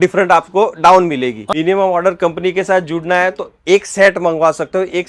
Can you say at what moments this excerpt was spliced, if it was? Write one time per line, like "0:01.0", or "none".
0:01.4